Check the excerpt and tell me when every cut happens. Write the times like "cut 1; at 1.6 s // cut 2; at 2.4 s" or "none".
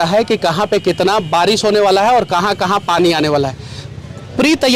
none